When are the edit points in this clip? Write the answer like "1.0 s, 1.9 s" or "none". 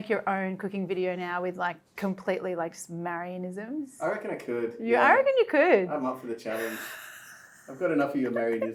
none